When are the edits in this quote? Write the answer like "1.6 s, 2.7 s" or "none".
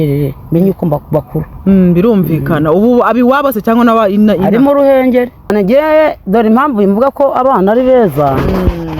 5.5 s